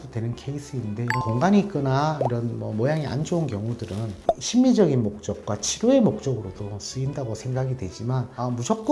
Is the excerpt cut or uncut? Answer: uncut